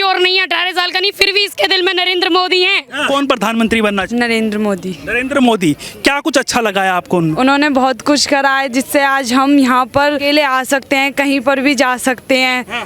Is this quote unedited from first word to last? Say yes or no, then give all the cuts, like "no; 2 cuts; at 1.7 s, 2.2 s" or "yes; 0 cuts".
no; 4 cuts; at 3.1 s, 4.1 s, 7.4 s, 10.2 s